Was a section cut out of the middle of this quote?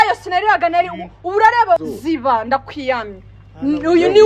yes; 1 cut; at 1.8 s

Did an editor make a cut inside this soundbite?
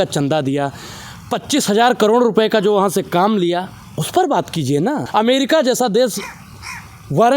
yes; 1 cut; at 5.0 s

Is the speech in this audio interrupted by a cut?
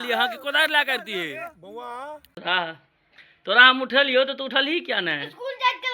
yes; 1 cut; at 2.4 s

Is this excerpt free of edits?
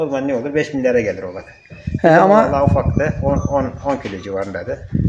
yes; 0 cuts

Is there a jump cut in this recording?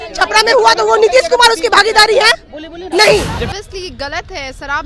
yes; 1 cut; at 3.5 s

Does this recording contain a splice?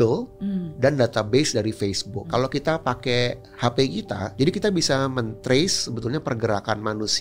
yes; 2 cuts; at 2.4 s, 4.3 s

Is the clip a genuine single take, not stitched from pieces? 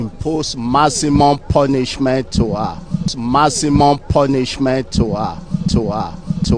no; 2 cuts; at 3.1 s, 5.7 s

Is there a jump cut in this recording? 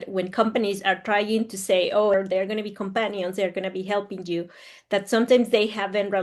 yes; 1 cut; at 2.1 s

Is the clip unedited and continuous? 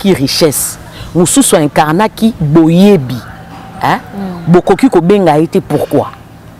yes; 0 cuts

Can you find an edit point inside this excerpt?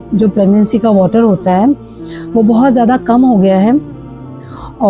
no; 0 cuts

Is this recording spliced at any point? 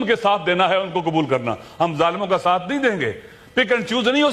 no; 0 cuts

